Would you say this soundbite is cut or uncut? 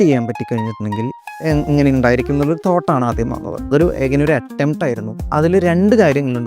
uncut